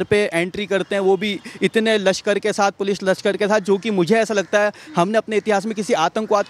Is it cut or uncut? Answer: uncut